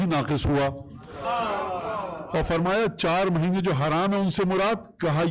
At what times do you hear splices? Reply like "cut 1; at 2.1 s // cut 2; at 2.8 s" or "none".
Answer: cut 1; at 1.2 s